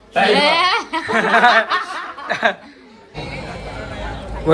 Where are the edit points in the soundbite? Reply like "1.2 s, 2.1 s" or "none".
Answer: 3.1 s